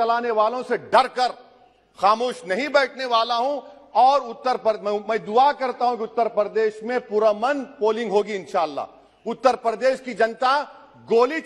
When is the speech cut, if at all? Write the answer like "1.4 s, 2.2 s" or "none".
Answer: none